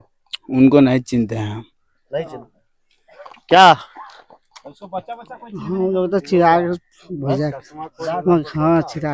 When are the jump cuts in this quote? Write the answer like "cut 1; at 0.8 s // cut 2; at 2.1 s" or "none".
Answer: none